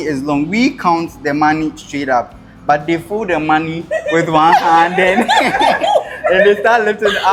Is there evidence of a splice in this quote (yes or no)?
no